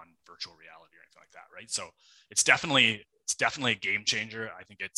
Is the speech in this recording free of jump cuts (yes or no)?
yes